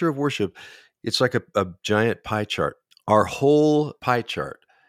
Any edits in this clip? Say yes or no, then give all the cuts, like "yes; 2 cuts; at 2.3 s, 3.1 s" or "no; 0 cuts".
yes; 2 cuts; at 2.9 s, 4.0 s